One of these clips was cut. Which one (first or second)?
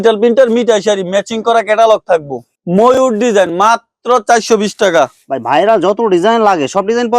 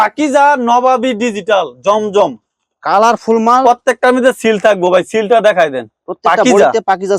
first